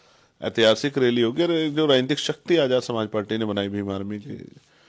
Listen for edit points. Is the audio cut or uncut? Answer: uncut